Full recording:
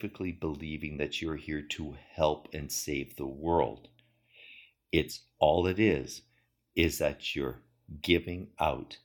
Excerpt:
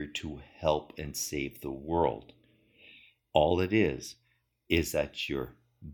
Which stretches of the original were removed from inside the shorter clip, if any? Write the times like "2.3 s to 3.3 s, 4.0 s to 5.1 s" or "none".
4.7 s to 5.2 s